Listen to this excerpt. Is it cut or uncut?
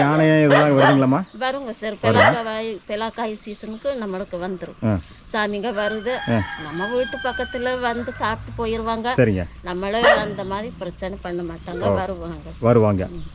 uncut